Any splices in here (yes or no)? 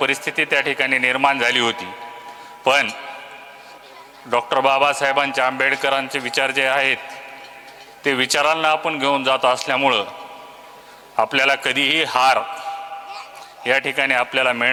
no